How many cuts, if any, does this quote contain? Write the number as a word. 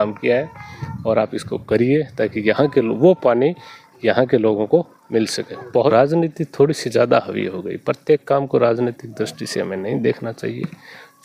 one